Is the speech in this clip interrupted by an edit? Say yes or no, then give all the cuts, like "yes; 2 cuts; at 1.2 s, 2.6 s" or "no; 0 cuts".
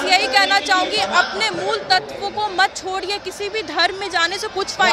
no; 0 cuts